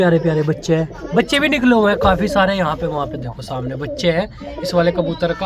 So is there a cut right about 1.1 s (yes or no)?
no